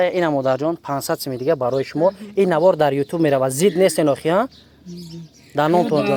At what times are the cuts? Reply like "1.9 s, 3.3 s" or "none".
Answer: none